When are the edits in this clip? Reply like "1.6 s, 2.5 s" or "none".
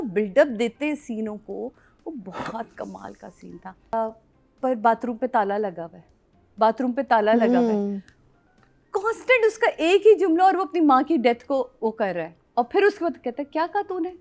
3.9 s